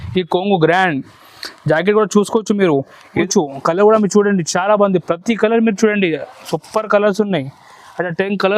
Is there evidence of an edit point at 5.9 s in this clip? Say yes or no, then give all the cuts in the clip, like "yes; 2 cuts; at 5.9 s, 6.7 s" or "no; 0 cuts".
no; 1 cut; at 3.3 s